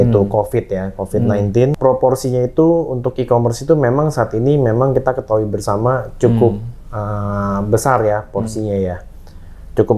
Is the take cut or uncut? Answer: cut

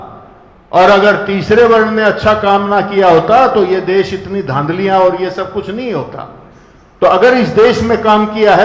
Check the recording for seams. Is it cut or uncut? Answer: uncut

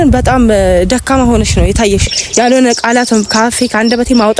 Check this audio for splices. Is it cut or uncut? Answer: cut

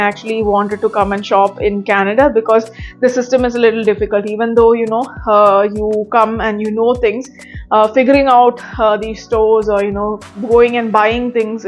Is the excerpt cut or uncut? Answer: uncut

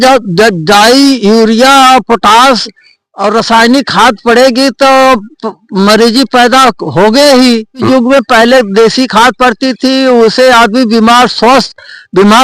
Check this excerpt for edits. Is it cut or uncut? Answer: cut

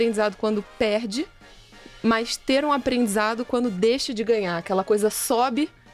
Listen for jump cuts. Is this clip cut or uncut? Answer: uncut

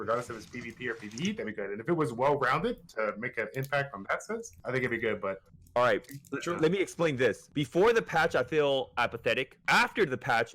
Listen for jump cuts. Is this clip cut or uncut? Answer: cut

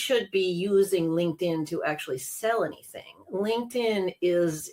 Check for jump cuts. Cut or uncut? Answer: uncut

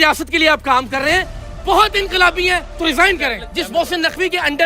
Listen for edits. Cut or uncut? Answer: cut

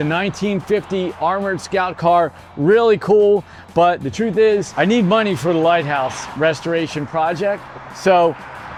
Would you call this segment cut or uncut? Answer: uncut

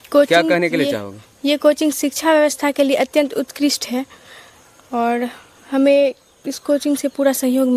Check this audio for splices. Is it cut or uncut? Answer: uncut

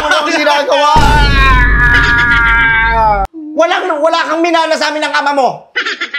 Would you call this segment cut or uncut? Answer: cut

